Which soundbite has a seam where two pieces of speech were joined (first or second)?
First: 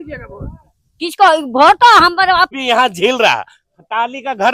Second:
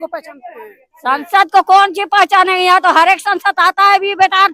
first